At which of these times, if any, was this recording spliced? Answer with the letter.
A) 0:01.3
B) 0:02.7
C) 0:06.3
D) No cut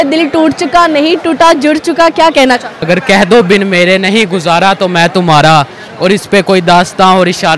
B